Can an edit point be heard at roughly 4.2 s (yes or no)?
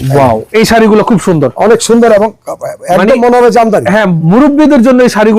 yes